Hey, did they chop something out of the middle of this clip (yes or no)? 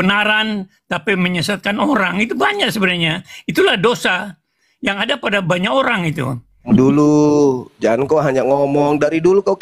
yes